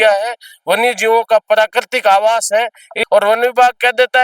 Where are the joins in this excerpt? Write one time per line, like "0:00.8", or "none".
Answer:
0:02.9